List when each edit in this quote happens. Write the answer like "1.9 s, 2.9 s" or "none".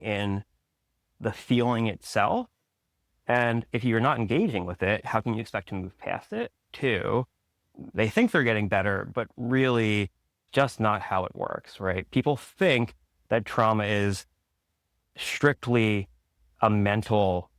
6.7 s, 10.4 s